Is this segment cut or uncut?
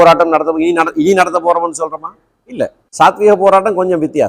cut